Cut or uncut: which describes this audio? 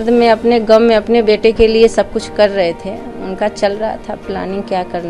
uncut